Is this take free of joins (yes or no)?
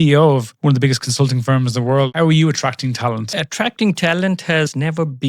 no